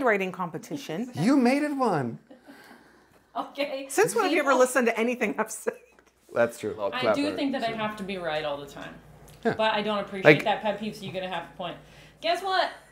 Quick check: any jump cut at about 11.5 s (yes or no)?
no